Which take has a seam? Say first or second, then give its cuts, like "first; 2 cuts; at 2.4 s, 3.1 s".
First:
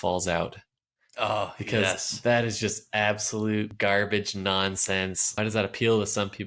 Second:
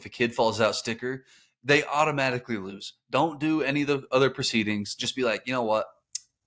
first; 2 cuts; at 3.7 s, 5.4 s